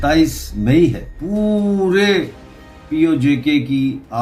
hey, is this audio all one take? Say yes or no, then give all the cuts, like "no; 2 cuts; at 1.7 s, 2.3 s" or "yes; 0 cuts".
no; 1 cut; at 1.1 s